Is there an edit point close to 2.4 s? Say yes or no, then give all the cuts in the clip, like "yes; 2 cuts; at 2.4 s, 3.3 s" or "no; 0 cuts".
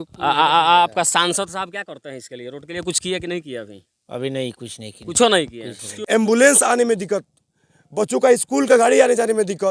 no; 1 cut; at 5.9 s